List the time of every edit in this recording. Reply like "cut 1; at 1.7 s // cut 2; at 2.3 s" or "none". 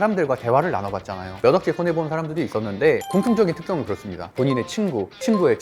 cut 1; at 1.4 s // cut 2; at 4.1 s